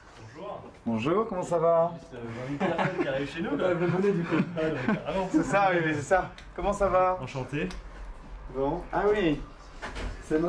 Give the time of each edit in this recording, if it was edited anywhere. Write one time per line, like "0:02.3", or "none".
0:09.4